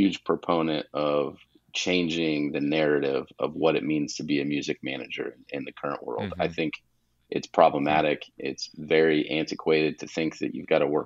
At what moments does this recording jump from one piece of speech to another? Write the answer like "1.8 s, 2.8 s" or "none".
none